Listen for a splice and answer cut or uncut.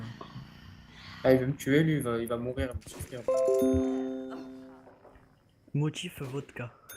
cut